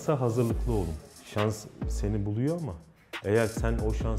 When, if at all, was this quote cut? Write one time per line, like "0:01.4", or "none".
0:01.1